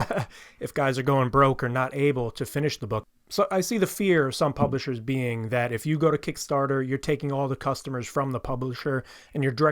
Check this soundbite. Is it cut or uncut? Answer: cut